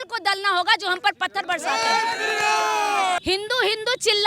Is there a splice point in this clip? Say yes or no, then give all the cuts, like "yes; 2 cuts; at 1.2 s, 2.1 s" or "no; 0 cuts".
yes; 1 cut; at 3.2 s